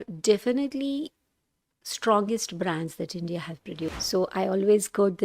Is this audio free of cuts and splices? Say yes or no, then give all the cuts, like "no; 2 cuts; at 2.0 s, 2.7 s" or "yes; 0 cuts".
no; 1 cut; at 3.9 s